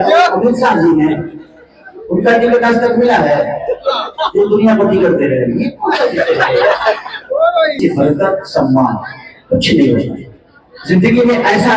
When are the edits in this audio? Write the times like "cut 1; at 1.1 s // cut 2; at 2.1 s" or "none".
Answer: cut 1; at 7.8 s